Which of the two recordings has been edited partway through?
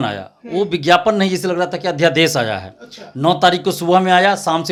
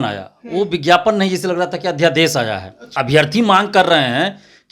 second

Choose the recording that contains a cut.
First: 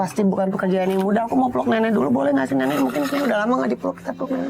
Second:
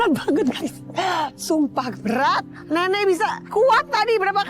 second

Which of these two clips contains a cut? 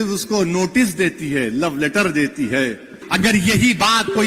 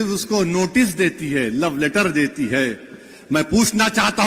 first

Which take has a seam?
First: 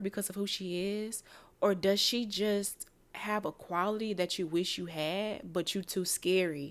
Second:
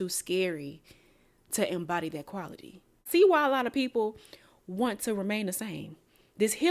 second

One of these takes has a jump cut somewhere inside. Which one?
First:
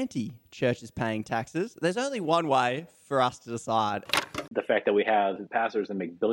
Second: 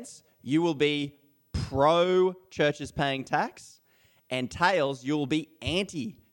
first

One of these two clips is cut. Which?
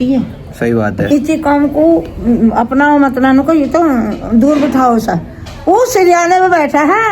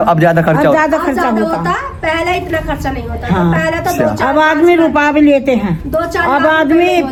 first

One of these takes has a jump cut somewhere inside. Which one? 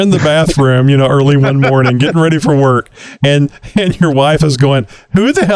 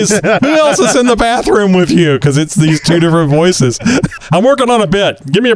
second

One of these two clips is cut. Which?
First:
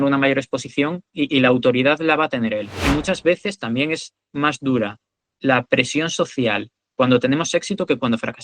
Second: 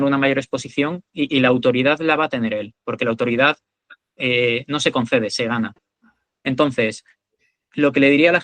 first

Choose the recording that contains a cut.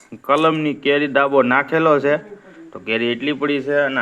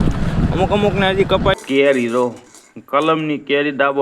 second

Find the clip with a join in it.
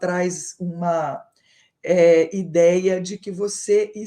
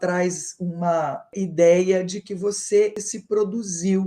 second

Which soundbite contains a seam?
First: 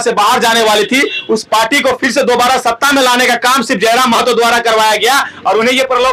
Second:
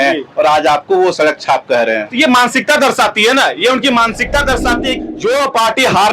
second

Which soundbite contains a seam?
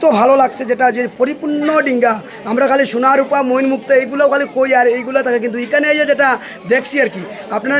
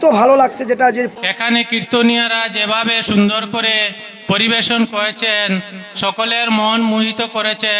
second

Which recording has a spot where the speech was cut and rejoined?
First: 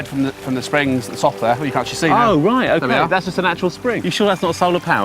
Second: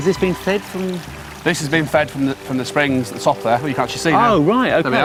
first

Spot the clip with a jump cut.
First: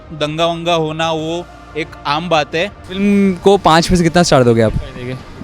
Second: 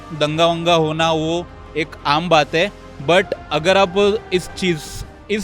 first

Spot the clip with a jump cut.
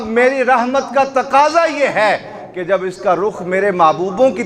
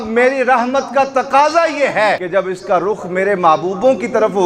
second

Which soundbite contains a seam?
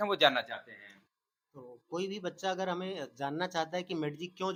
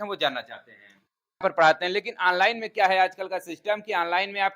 second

